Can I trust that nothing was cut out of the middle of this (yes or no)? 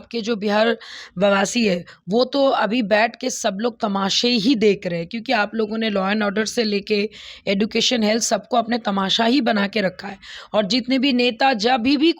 yes